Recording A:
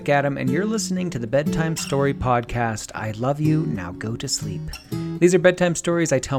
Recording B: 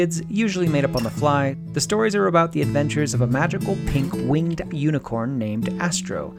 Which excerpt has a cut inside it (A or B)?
B